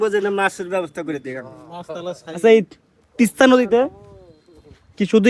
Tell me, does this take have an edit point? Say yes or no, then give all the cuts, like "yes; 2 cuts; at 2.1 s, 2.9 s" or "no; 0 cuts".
no; 0 cuts